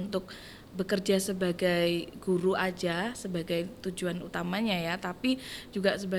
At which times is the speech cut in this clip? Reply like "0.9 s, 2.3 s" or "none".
none